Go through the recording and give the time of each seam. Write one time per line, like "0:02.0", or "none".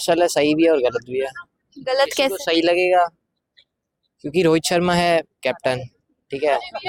none

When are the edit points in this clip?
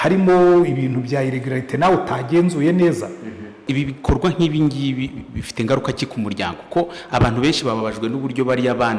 0:03.6

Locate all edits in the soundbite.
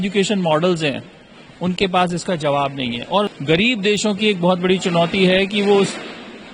0:03.3

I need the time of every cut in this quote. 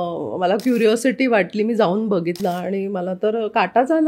0:02.4

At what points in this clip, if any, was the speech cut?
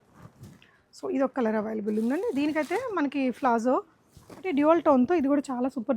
0:04.4

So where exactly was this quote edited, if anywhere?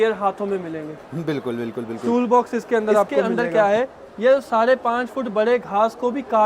0:03.2

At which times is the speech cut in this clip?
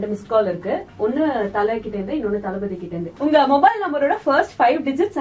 0:03.0

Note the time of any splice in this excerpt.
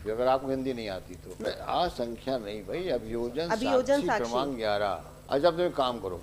0:01.5
0:05.1

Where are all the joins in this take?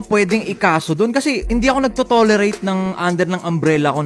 0:01.4

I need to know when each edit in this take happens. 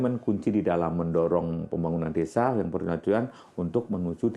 none

